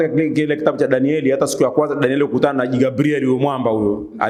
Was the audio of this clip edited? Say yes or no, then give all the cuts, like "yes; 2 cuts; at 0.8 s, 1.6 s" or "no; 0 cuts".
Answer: no; 0 cuts